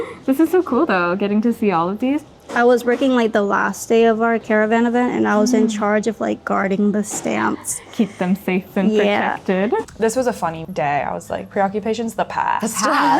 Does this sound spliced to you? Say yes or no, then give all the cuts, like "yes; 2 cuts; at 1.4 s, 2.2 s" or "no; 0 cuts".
yes; 4 cuts; at 2.4 s, 4.4 s, 9.8 s, 10.6 s